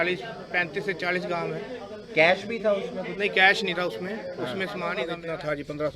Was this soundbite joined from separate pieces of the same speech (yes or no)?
yes